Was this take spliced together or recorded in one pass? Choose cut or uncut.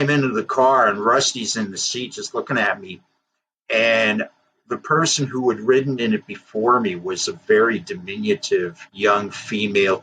uncut